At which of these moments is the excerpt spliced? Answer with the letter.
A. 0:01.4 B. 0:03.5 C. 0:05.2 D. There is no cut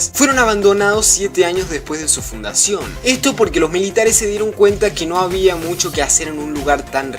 D